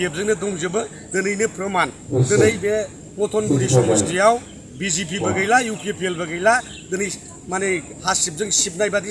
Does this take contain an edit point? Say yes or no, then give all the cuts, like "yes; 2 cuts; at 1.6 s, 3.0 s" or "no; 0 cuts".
no; 0 cuts